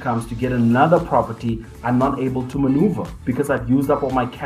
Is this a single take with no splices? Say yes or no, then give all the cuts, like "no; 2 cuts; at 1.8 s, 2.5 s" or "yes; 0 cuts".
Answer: yes; 0 cuts